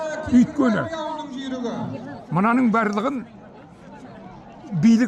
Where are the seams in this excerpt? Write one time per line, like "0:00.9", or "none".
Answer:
none